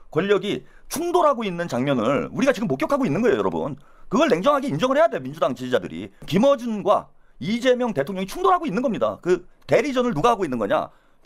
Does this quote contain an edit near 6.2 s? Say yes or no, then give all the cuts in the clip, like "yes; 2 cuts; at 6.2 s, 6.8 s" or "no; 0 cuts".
yes; 1 cut; at 6.2 s